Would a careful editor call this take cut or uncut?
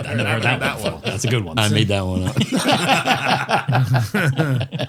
uncut